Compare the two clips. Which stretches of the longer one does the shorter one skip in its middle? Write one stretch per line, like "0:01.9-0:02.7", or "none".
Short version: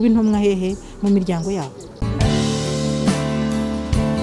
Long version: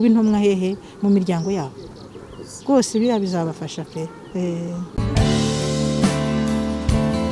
0:01.9-0:04.9